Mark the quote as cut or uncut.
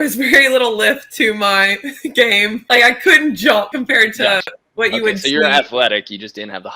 cut